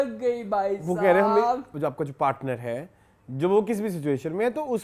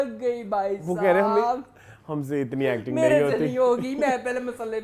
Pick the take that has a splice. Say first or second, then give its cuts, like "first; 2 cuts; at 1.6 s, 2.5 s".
first; 1 cut; at 1.7 s